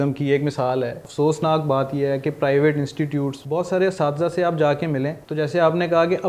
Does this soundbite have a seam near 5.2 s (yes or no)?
yes